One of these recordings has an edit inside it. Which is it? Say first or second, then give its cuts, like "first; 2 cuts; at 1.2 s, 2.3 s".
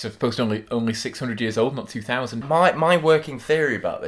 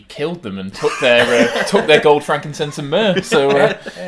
first; 1 cut; at 2.4 s